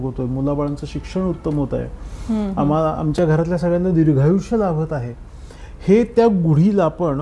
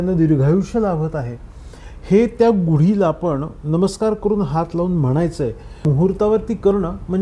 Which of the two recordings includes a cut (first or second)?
second